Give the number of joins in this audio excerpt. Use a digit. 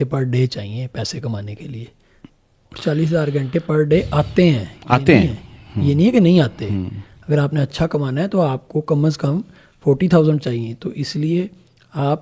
0